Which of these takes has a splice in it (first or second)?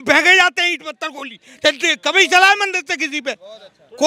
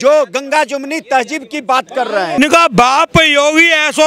second